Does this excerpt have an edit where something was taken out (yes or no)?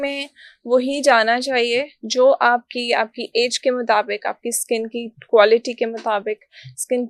no